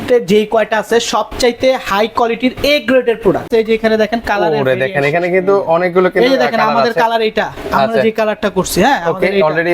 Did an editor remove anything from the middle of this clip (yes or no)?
yes